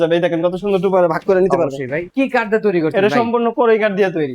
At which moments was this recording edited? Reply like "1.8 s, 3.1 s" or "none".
2.1 s